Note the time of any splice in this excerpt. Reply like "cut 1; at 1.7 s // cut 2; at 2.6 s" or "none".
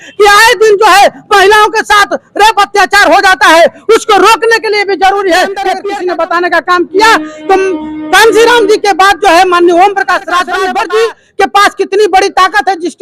cut 1; at 5.8 s // cut 2; at 10.6 s